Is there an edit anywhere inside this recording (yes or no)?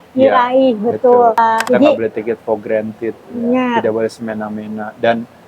yes